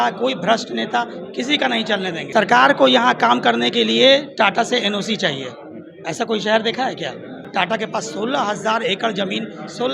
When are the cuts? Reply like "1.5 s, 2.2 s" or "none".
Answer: 2.2 s, 7.4 s